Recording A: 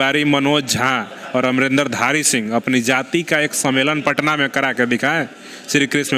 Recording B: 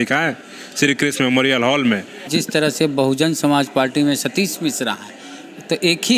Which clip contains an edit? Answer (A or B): B